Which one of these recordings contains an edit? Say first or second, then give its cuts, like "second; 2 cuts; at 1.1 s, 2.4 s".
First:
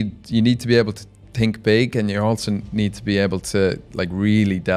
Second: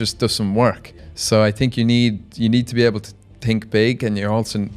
second; 1 cut; at 0.9 s